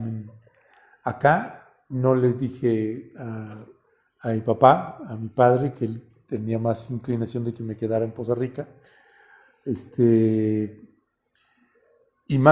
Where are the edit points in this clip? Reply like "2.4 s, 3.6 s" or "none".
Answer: none